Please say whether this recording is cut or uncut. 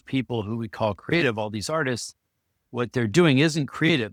uncut